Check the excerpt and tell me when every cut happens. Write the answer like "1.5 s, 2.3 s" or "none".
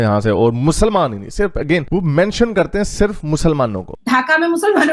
3.9 s